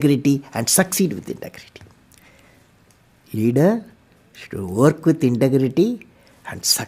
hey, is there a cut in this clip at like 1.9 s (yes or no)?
no